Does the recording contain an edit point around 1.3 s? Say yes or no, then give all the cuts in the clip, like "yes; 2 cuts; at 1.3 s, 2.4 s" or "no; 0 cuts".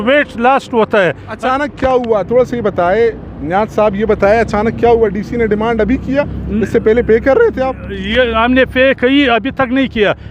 no; 0 cuts